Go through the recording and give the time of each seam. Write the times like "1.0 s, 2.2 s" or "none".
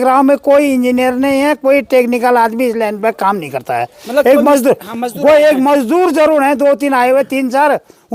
none